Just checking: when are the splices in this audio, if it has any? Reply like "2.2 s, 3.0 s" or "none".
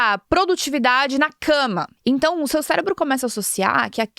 1.9 s